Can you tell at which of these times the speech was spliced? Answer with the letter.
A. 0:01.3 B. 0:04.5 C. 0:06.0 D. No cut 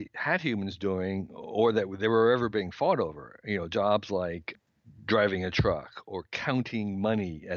B